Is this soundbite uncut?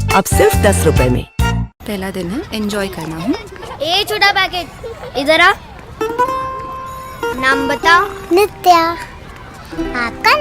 no; 1 cut; at 1.7 s

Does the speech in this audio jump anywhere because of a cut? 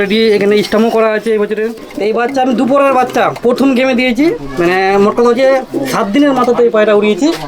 yes; 1 cut; at 1.8 s

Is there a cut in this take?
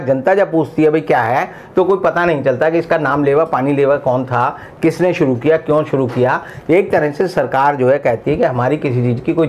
no; 0 cuts

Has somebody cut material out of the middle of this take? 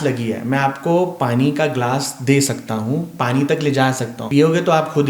yes; 1 cut; at 4.1 s

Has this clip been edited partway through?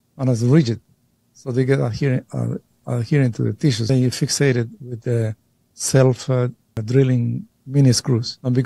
yes; 3 cuts; at 3.9 s, 6.7 s, 7.5 s

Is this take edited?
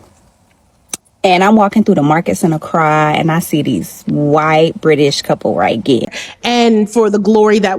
yes; 1 cut; at 6.2 s

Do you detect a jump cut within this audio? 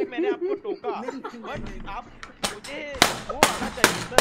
no; 0 cuts

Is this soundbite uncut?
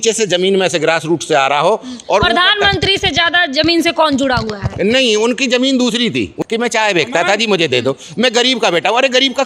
no; 1 cut; at 6.3 s

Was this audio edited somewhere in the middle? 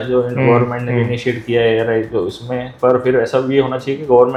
no; 0 cuts

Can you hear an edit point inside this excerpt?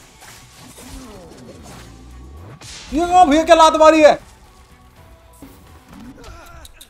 yes; 1 cut; at 5.5 s

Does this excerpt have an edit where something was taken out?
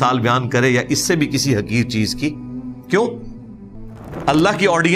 no; 0 cuts

